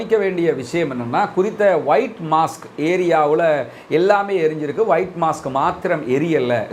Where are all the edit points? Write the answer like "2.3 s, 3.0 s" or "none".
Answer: none

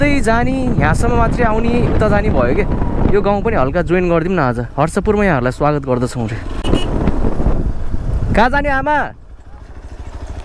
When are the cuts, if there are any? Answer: 6.6 s

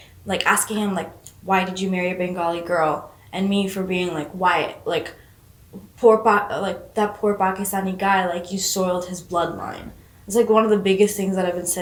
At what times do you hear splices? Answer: none

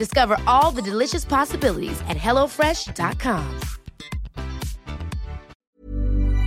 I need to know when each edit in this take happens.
5.5 s

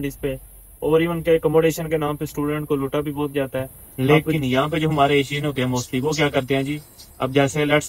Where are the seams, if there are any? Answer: 3.8 s

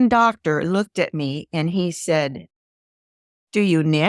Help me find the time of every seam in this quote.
none

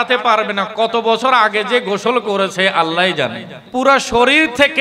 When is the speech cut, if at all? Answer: 3.5 s

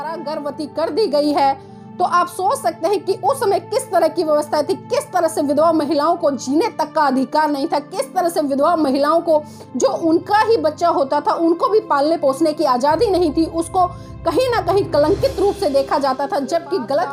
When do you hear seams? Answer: none

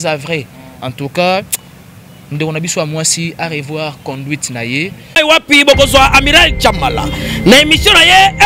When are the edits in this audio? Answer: 5.0 s

